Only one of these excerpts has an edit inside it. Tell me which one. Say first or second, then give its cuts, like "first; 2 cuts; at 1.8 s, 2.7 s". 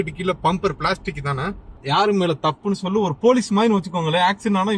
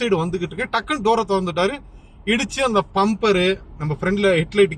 first; 1 cut; at 1.8 s